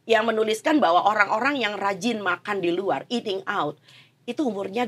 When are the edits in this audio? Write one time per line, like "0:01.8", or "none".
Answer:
none